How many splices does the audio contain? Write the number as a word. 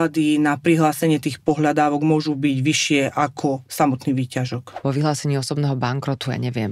one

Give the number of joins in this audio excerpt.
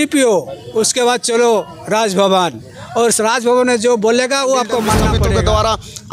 one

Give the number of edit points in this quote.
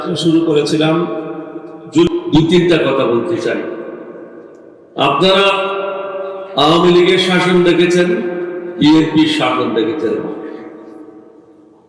one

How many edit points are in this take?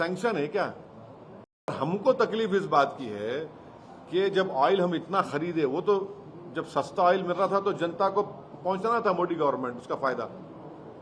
one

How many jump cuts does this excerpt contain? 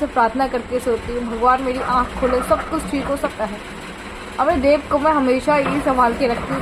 one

